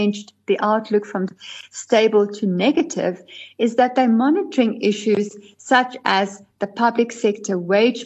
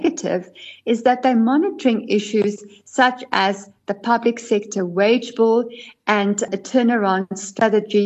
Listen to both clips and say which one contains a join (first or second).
second